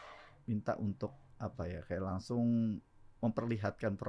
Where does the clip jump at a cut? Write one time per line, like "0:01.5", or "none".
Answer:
none